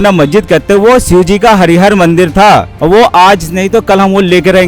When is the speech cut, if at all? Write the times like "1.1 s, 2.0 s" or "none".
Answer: 2.7 s